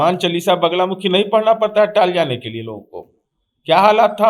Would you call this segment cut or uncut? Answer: uncut